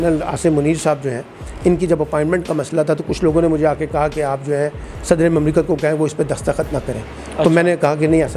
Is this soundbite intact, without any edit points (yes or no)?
yes